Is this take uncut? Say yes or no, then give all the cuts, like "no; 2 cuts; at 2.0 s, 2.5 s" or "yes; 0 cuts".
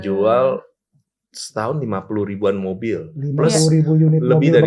yes; 0 cuts